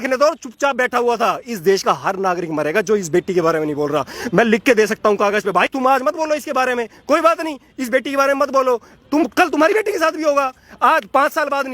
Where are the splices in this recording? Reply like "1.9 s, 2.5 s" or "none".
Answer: none